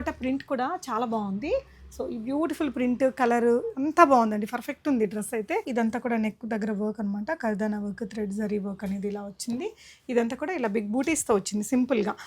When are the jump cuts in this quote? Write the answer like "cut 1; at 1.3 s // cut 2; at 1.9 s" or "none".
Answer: cut 1; at 5.7 s